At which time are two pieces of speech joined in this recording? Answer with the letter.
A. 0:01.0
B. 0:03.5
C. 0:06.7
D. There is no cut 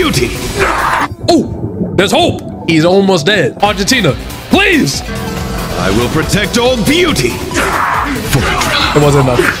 B